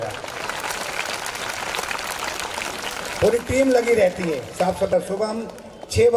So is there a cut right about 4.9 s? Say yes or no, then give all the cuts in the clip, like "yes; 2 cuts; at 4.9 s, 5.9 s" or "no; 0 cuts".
yes; 1 cut; at 4.9 s